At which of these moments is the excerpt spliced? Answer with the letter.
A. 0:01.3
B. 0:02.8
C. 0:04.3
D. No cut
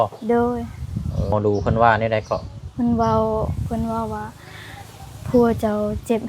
A